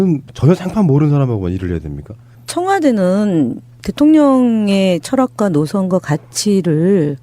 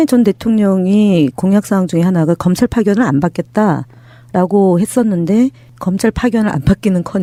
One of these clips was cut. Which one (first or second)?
first